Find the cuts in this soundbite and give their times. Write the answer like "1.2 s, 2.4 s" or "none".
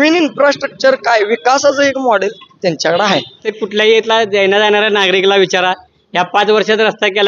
3.5 s